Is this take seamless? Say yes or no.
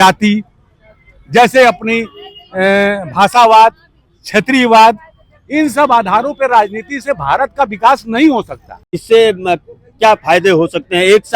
no